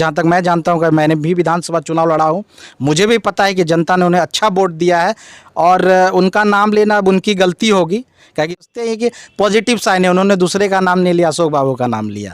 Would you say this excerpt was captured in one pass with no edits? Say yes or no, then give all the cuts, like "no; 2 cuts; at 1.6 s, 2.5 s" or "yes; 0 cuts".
no; 1 cut; at 8.6 s